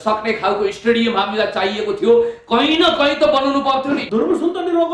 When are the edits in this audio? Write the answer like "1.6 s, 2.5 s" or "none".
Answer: 4.0 s